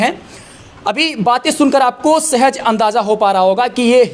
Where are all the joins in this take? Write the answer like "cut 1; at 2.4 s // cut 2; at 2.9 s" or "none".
none